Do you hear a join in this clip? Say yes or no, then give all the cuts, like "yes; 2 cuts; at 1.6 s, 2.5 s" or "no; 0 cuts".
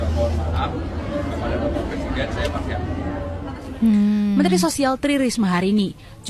no; 0 cuts